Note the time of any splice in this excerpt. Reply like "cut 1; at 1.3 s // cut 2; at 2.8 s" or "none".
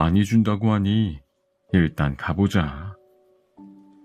cut 1; at 3.1 s

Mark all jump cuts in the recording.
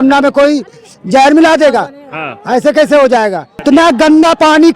cut 1; at 3.5 s

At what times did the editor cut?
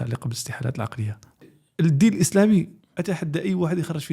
cut 1; at 1.6 s

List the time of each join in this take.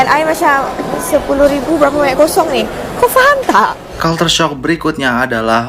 cut 1; at 3.9 s

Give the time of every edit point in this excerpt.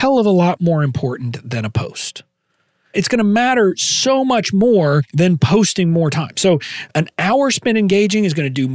cut 1; at 2.9 s // cut 2; at 5.1 s // cut 3; at 6.8 s

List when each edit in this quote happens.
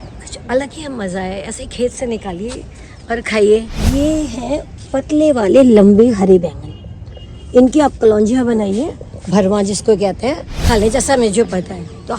cut 1; at 3.8 s // cut 2; at 10.5 s

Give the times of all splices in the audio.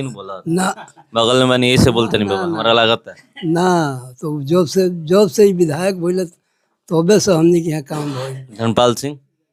none

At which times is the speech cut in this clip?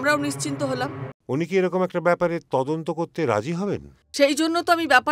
cut 1; at 1.1 s

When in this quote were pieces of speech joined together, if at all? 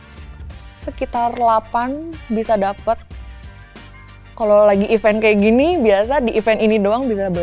none

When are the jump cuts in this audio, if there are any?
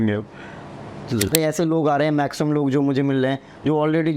cut 1; at 1.3 s

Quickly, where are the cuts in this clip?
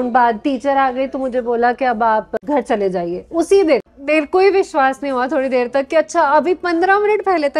cut 1; at 2.3 s // cut 2; at 3.9 s

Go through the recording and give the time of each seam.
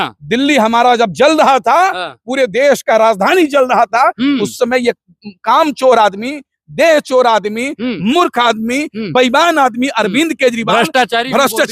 none

